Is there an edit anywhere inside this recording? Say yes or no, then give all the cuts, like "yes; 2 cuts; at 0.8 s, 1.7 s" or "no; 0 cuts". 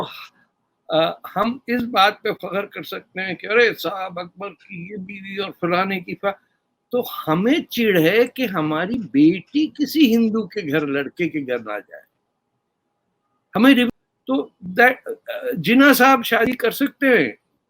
yes; 1 cut; at 13.9 s